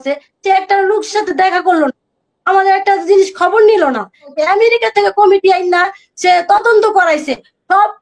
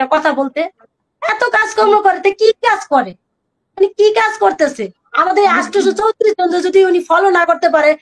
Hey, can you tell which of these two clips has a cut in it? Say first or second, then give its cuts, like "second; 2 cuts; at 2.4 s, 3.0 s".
first; 1 cut; at 4.3 s